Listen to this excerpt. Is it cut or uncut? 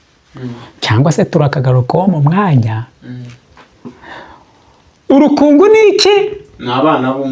uncut